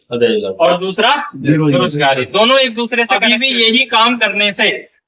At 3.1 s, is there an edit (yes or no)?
yes